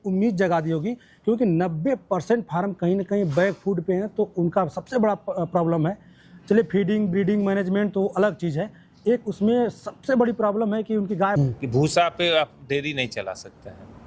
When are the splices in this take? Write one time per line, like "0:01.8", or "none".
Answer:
0:11.4